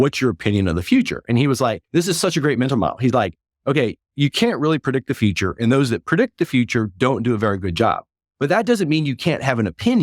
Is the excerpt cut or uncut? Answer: cut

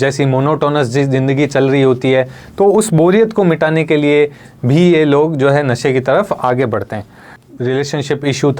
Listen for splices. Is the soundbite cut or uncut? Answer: cut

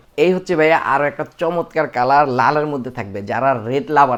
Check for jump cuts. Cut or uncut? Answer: uncut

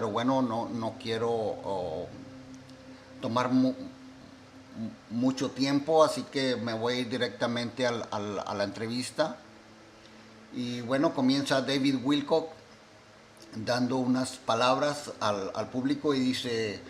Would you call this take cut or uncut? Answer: cut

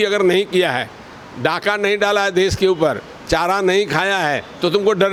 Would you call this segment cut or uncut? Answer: uncut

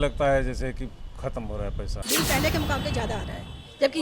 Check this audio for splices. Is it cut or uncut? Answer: cut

